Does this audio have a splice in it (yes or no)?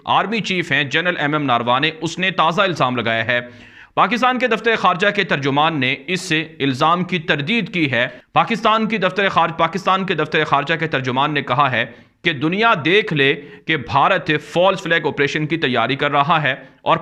no